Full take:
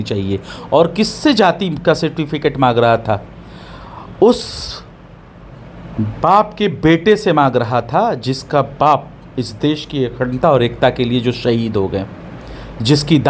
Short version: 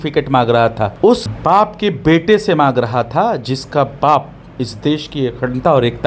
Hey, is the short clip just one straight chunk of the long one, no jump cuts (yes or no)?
no